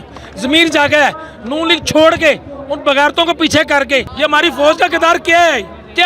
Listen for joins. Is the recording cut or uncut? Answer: cut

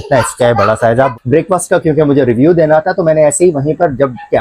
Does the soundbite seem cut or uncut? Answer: cut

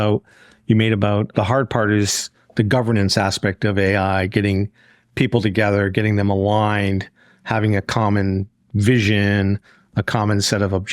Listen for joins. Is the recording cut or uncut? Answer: cut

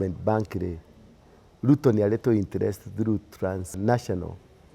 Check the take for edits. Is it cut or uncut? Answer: cut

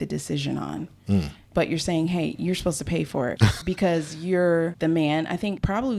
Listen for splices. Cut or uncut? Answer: cut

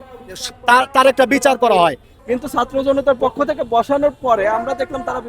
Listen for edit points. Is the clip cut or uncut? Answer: cut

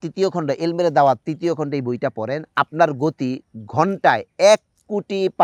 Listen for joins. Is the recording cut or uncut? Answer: uncut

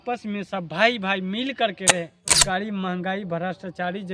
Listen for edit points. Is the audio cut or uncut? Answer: cut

